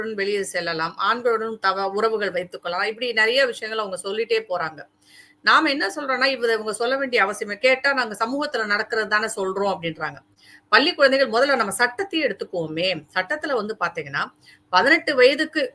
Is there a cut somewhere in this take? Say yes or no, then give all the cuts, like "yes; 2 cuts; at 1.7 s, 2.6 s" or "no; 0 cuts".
no; 0 cuts